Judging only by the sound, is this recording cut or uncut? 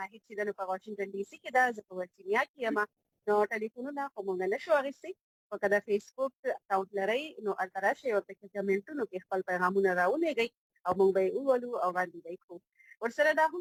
uncut